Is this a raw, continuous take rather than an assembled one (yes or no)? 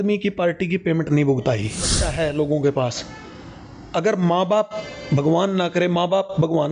no